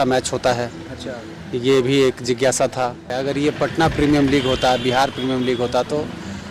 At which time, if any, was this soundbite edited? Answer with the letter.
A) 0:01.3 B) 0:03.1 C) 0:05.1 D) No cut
B